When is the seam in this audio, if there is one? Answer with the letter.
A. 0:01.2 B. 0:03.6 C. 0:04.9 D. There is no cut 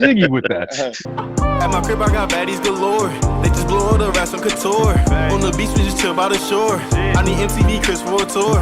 A